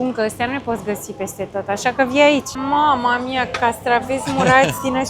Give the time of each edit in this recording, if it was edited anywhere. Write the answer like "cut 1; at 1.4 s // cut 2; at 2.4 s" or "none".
cut 1; at 2.5 s